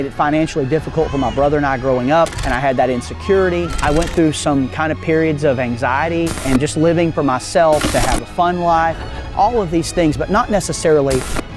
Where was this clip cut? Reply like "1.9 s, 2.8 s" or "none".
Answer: 2.4 s, 3.8 s, 6.4 s, 7.9 s